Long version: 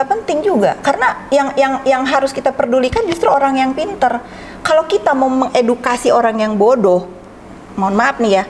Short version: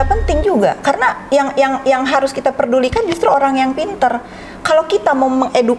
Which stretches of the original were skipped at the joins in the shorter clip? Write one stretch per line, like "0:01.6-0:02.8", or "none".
none